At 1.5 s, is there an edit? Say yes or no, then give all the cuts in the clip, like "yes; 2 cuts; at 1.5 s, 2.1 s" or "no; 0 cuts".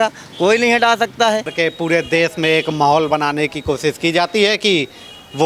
yes; 1 cut; at 1.5 s